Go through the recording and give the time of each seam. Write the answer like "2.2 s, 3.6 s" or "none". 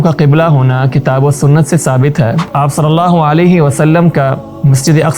2.5 s

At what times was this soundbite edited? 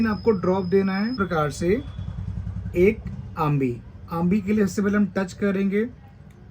1.1 s

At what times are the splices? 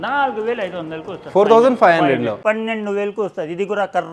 2.4 s

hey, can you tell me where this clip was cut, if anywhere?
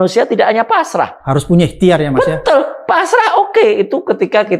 none

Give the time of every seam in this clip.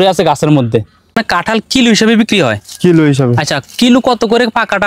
1.2 s

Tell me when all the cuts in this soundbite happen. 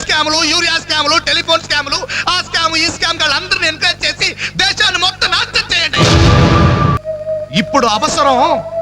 7.0 s

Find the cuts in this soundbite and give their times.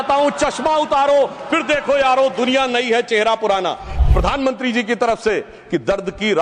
4.0 s

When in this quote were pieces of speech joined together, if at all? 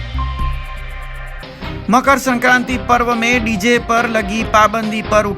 1.4 s

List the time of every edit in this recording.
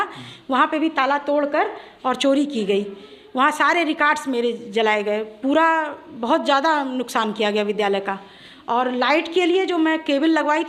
none

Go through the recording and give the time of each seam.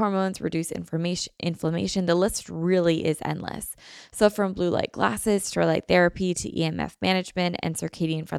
none

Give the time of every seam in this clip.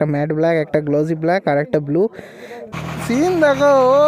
2.7 s

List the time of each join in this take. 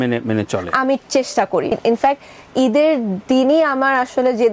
1.8 s

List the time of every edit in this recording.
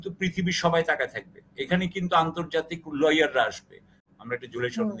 3.9 s

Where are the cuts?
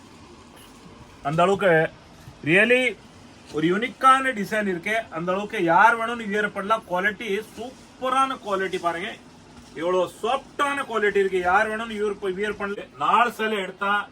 12.7 s

